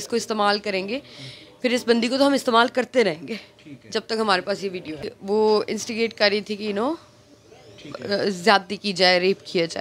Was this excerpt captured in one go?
no; 1 cut; at 4.9 s

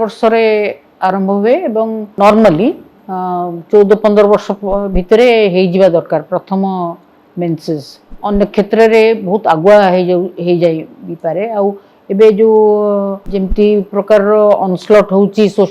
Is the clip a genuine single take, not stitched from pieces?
no; 2 cuts; at 2.1 s, 8.2 s

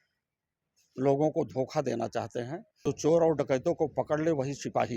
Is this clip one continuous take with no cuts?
no; 1 cut; at 2.8 s

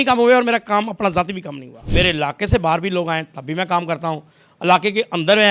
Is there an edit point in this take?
yes; 1 cut; at 1.8 s

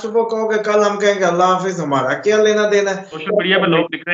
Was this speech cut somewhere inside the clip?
yes; 1 cut; at 3.2 s

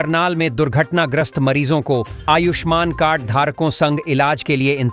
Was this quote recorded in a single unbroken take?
yes; 0 cuts

